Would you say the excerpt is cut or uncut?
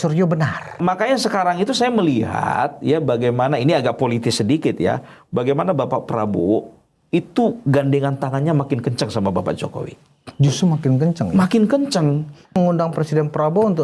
cut